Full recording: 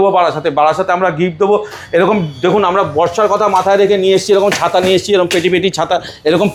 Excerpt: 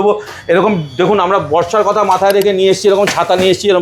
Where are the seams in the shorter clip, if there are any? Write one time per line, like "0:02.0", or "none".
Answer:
none